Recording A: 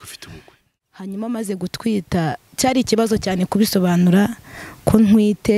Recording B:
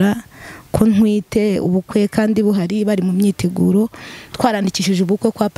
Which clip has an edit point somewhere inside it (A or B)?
A